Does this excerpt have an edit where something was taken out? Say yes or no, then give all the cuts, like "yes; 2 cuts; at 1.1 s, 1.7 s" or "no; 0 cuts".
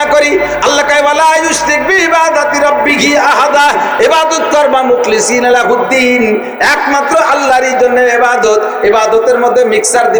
no; 0 cuts